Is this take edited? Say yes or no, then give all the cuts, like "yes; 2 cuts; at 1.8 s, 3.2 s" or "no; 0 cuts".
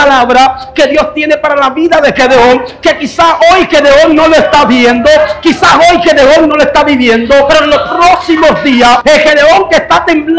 yes; 2 cuts; at 7.5 s, 9.0 s